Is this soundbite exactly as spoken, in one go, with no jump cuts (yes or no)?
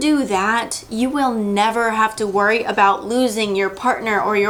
yes